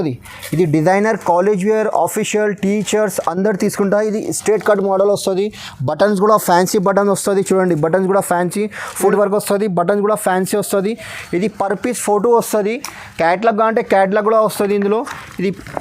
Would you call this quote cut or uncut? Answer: cut